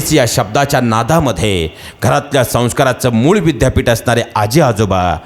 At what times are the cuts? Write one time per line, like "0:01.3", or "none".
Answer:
none